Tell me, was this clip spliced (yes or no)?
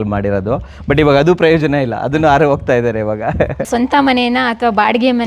yes